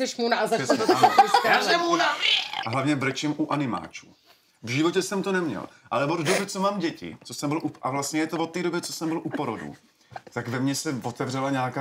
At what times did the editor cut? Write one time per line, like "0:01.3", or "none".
0:02.5